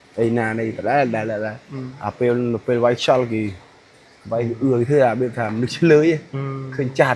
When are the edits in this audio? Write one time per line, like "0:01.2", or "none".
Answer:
none